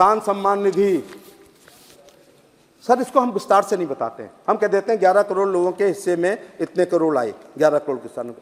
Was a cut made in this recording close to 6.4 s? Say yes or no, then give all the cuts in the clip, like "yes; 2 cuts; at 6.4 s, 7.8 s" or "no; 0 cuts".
no; 0 cuts